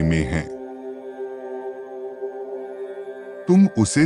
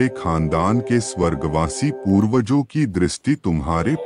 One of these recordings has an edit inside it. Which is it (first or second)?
first